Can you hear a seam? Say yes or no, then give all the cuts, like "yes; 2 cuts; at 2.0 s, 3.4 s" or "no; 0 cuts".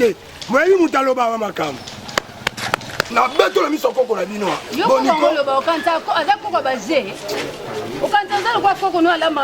yes; 2 cuts; at 3.0 s, 4.7 s